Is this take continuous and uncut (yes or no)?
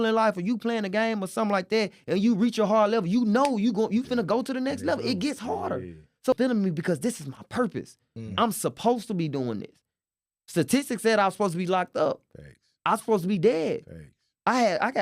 no